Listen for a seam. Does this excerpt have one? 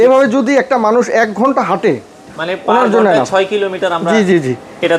no; 0 cuts

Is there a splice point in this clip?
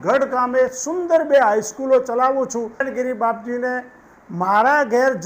yes; 1 cut; at 2.8 s

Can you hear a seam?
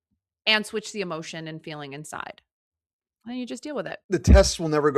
yes; 1 cut; at 4.0 s

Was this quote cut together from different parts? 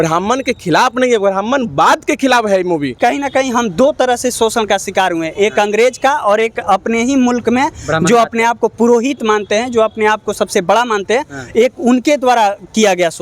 yes; 1 cut; at 2.9 s

